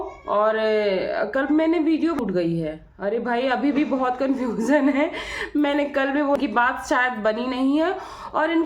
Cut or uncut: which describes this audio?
cut